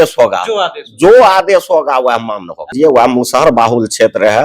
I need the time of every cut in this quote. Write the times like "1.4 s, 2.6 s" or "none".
2.7 s